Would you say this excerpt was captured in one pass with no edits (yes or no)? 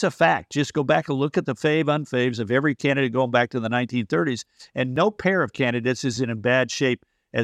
no